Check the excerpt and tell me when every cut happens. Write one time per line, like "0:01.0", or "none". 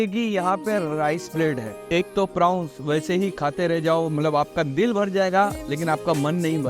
0:01.8